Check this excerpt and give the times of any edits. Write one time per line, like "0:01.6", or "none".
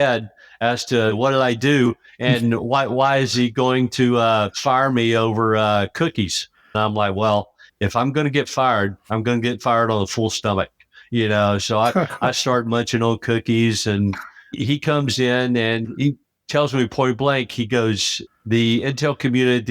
0:01.1
0:04.5
0:06.8
0:14.6